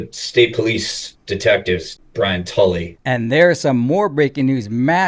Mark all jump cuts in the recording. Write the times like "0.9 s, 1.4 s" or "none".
2.0 s, 2.9 s